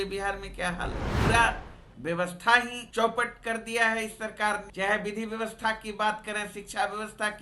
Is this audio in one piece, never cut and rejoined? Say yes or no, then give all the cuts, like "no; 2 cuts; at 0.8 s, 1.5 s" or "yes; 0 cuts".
no; 3 cuts; at 1.1 s, 2.8 s, 4.7 s